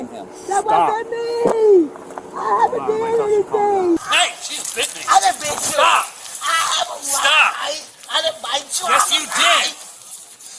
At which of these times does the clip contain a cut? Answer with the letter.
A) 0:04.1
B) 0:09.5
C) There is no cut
A